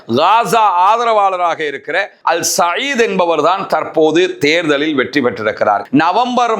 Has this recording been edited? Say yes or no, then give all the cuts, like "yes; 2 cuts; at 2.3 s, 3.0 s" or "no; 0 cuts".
yes; 2 cuts; at 2.1 s, 5.8 s